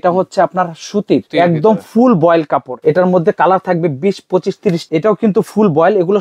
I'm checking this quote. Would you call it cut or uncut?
cut